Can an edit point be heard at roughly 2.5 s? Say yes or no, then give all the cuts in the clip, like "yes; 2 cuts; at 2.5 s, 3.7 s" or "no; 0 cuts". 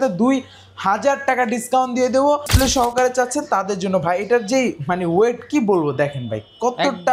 yes; 1 cut; at 2.5 s